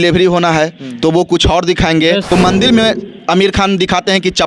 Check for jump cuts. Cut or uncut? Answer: cut